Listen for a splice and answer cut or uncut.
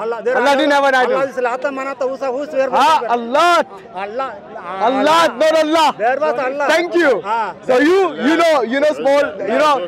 uncut